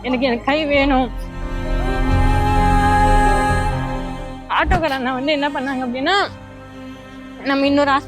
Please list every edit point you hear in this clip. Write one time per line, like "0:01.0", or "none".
0:01.4
0:04.5